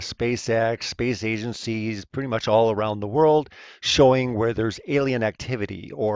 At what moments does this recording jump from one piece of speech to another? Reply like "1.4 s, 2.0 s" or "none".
2.8 s